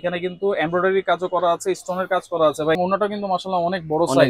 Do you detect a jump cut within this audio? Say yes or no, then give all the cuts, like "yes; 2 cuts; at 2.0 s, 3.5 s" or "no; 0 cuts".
yes; 1 cut; at 2.8 s